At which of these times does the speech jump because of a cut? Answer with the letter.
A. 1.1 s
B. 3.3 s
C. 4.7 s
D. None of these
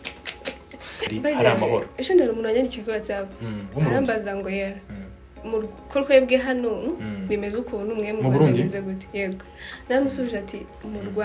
A